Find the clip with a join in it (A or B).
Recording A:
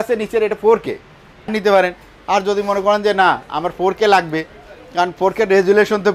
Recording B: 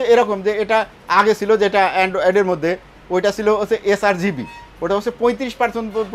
A